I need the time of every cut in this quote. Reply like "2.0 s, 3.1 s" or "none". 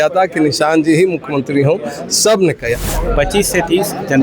2.8 s